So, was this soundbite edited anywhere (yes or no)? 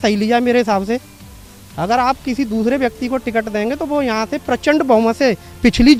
no